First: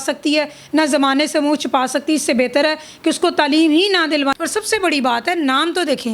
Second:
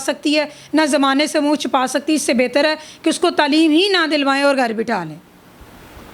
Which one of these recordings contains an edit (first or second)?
first